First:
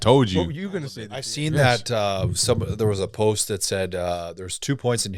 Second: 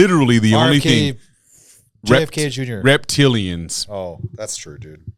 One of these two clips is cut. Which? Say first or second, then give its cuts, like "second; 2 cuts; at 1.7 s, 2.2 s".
first; 1 cut; at 0.9 s